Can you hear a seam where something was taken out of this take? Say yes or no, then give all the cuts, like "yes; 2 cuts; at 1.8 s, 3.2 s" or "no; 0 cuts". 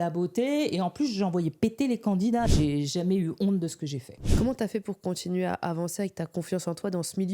yes; 2 cuts; at 2.5 s, 4.3 s